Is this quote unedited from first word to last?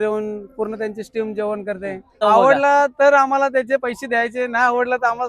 no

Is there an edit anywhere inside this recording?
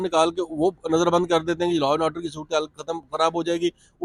no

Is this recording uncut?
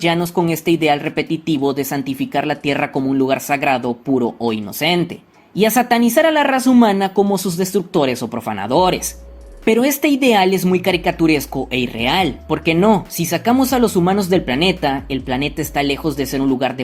yes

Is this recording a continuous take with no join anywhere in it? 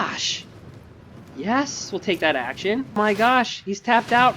no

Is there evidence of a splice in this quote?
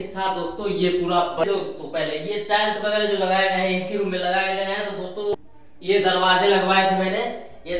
yes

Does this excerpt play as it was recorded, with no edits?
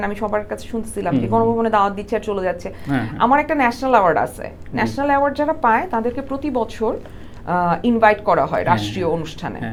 yes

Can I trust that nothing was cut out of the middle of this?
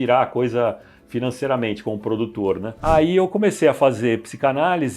no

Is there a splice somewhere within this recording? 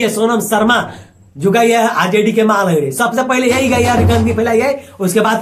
no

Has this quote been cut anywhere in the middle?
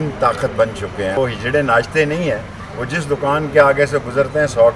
yes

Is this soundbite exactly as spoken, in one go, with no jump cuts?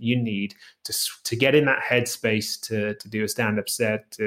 no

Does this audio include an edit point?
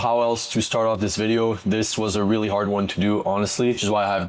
no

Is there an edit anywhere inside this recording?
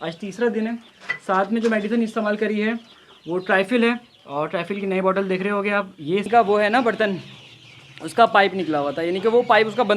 yes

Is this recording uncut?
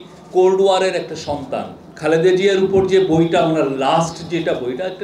no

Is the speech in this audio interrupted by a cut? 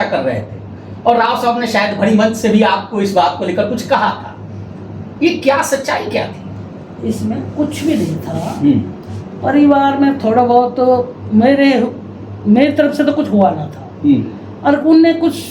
no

